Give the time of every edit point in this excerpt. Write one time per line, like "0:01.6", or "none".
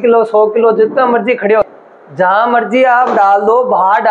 0:01.6